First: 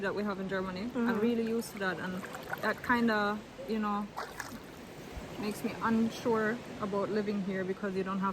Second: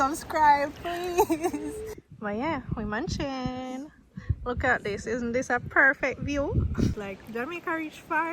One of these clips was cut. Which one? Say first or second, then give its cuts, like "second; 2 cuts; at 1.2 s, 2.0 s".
second; 2 cuts; at 1.9 s, 7.0 s